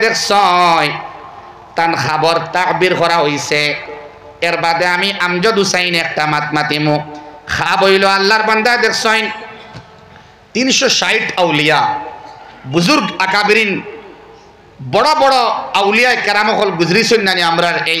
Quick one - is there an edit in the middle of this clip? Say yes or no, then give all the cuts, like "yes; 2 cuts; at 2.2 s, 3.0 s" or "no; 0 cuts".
no; 0 cuts